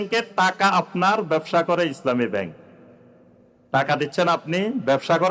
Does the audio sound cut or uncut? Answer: uncut